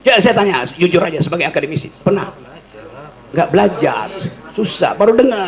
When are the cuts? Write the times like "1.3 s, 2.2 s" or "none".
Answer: none

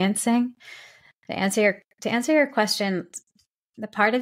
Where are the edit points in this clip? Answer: none

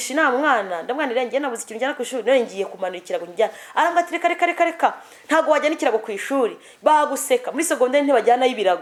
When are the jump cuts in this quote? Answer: none

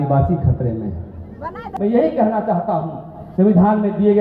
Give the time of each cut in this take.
1.6 s

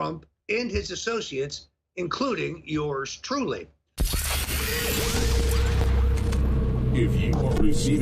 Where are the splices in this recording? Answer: 3.9 s

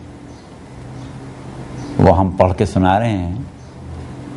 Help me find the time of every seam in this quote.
1.0 s

